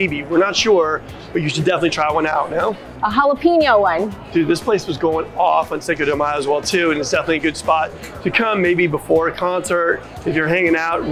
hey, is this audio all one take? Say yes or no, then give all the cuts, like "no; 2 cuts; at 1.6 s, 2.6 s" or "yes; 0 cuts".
yes; 0 cuts